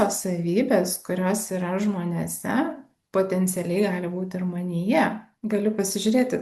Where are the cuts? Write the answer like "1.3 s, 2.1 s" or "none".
5.3 s